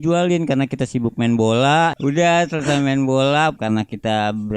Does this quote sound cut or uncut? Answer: cut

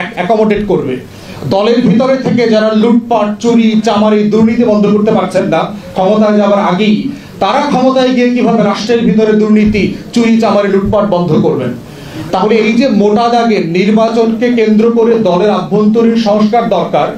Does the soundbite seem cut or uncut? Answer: uncut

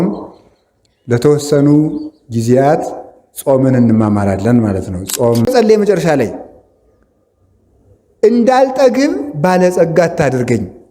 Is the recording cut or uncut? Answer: cut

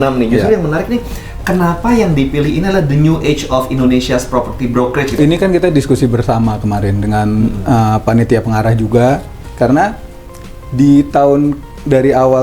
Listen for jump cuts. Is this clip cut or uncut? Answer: cut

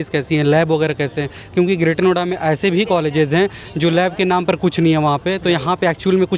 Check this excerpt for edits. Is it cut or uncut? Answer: uncut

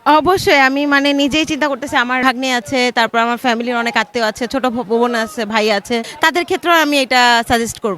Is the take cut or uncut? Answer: cut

